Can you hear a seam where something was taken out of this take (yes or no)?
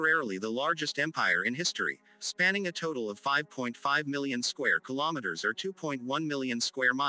no